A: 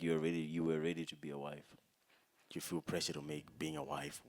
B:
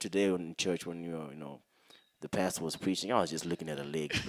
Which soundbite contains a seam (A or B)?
A